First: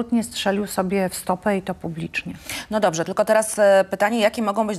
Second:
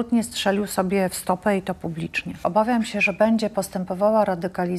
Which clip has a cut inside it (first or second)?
second